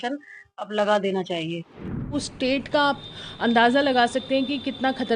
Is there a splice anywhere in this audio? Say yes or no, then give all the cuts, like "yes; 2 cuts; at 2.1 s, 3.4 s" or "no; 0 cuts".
yes; 1 cut; at 2.1 s